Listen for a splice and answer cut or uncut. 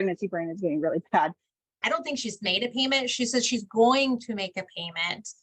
cut